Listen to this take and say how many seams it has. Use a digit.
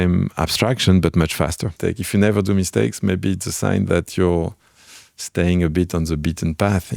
1